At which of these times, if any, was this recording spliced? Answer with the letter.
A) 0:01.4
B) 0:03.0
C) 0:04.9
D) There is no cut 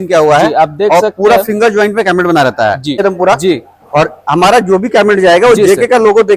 B